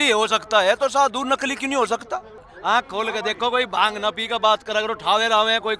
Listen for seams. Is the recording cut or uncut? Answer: cut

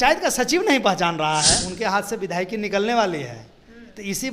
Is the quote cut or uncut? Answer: cut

